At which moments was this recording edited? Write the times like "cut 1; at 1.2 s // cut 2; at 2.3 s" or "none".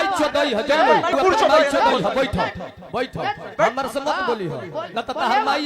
cut 1; at 1.1 s